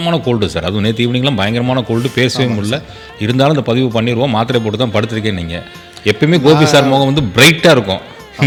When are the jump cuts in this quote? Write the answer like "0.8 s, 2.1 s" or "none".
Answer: none

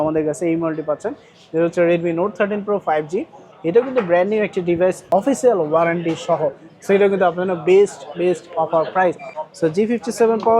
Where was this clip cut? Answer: 5.0 s, 9.4 s

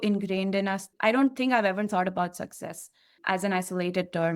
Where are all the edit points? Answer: 0.9 s, 3.2 s

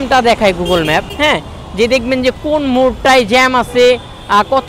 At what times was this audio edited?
1.1 s

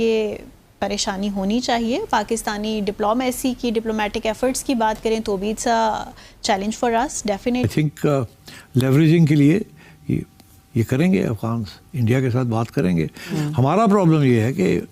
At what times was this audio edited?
7.7 s

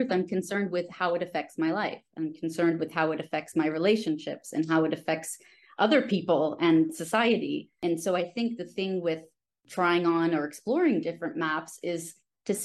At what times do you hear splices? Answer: 7.8 s, 9.6 s

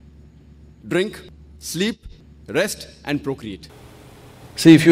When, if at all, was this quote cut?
3.7 s

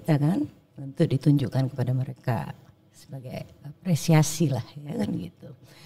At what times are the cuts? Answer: none

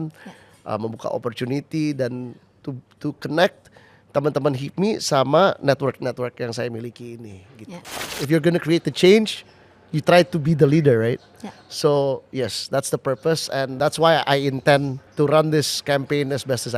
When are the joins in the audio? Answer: 8.1 s, 13.7 s, 15.0 s

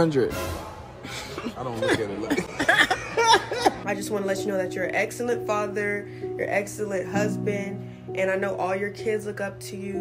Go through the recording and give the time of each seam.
3.8 s

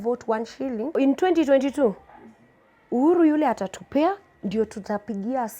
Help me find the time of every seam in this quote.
0.9 s

